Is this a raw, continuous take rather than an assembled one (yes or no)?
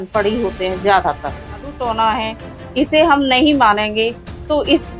no